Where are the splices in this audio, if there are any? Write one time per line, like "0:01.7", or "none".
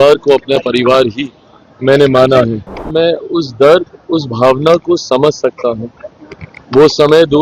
0:02.8